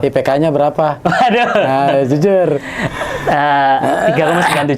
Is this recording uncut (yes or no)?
yes